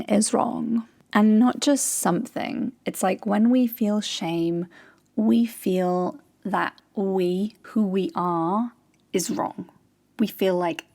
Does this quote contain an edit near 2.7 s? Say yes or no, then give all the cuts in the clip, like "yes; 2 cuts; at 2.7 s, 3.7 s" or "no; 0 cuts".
no; 3 cuts; at 1.0 s, 6.8 s, 7.6 s